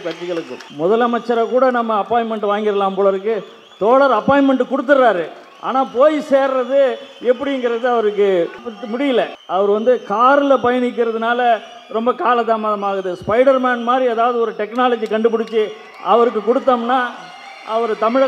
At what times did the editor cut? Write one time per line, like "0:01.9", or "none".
none